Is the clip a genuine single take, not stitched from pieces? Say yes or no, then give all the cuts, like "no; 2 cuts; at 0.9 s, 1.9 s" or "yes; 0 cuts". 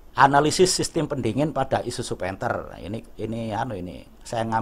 yes; 0 cuts